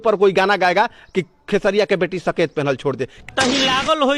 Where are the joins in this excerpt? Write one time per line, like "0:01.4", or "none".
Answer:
0:03.3

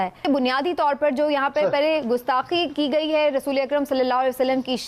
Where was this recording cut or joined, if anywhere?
none

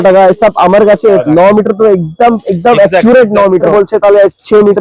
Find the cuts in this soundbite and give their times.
0:01.2
0:03.7

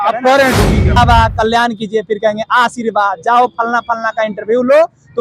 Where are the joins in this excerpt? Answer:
0:01.0

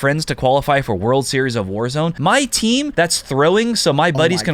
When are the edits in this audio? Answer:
0:02.2
0:02.9

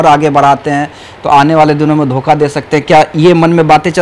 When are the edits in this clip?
none

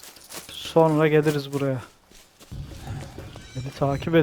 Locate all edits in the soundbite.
0:02.5

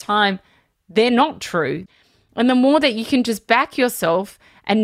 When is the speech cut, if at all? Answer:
0:01.8

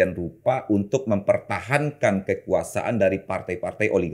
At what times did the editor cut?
none

